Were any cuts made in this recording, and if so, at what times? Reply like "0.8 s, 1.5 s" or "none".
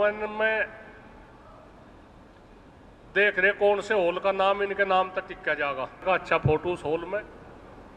6.0 s